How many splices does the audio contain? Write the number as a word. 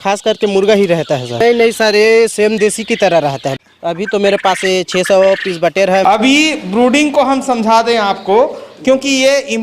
three